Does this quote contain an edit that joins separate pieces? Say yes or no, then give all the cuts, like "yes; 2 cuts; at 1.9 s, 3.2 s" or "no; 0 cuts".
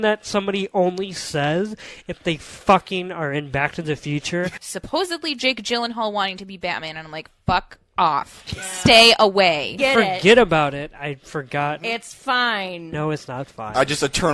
yes; 2 cuts; at 4.7 s, 9.8 s